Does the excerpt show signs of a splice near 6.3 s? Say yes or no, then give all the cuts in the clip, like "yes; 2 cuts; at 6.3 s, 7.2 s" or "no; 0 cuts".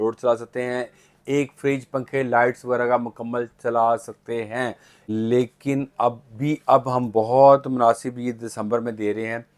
no; 1 cut; at 4.9 s